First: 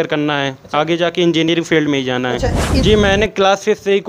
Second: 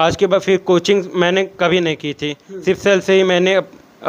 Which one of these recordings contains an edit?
first; 1 cut; at 2.6 s

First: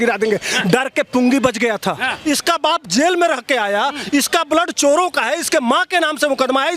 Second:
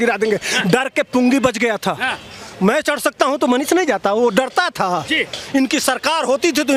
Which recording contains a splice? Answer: first; 1 cut; at 2.1 s

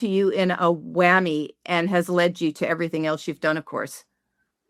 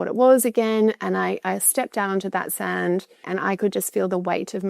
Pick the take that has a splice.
second; 1 cut; at 3.3 s

